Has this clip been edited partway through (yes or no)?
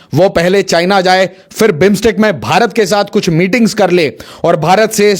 no